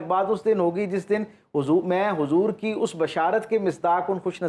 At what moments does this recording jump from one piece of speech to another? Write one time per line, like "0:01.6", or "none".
none

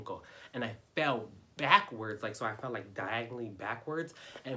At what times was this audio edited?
none

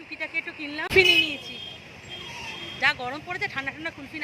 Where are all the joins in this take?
0:00.9

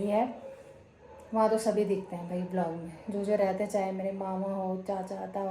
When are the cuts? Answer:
none

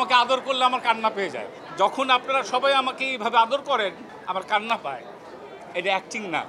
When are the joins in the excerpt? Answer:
none

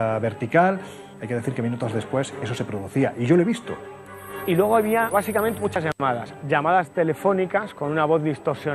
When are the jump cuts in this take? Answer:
0:03.7

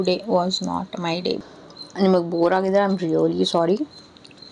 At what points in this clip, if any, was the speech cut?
0:01.4

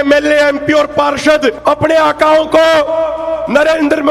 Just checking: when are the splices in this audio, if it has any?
0:01.6

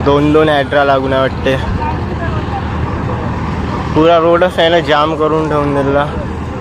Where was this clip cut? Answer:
none

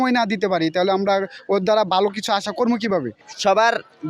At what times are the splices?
0:03.2

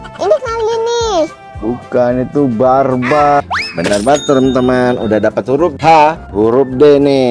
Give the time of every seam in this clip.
0:03.4

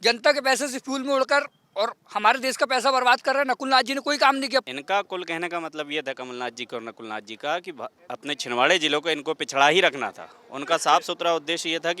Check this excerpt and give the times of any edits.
0:04.6

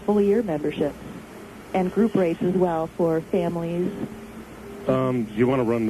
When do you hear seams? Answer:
none

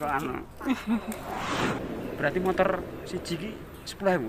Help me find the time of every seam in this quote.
0:01.7

